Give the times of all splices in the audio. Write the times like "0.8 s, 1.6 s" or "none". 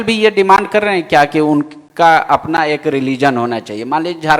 none